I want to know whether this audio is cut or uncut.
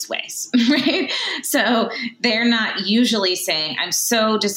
uncut